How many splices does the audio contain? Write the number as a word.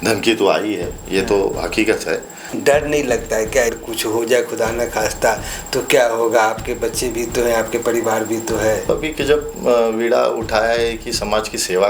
three